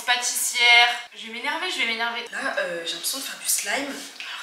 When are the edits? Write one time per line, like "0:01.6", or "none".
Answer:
0:01.2